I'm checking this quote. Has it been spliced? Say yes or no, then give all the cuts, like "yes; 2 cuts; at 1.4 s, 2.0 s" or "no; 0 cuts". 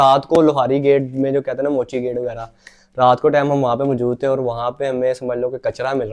no; 0 cuts